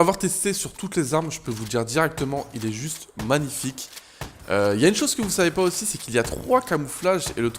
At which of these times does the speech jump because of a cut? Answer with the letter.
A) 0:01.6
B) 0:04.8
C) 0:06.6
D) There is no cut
B